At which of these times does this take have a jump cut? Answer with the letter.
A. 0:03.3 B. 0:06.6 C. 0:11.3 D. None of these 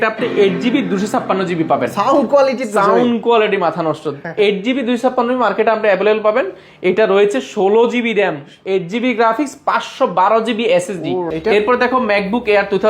C